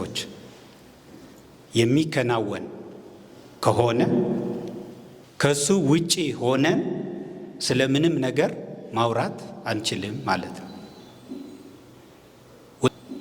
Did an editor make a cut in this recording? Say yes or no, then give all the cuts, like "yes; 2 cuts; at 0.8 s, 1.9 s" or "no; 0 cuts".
no; 0 cuts